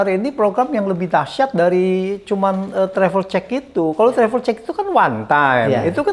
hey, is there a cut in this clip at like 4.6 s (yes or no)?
no